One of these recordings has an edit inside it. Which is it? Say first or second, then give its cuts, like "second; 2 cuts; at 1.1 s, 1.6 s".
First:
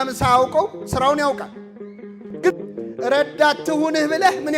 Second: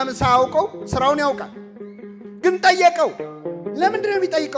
first; 1 cut; at 2.5 s